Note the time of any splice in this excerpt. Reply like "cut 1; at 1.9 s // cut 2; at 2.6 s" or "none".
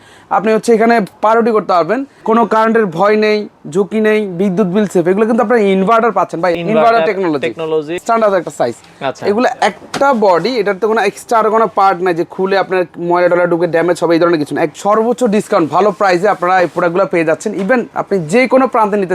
cut 1; at 2.1 s // cut 2; at 6.5 s // cut 3; at 8.0 s // cut 4; at 14.7 s